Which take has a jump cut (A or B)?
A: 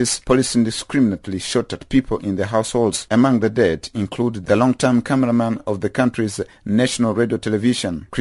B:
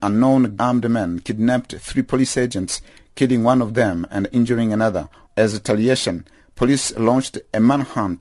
B